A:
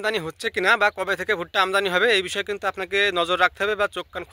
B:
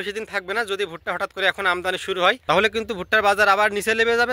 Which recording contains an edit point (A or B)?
B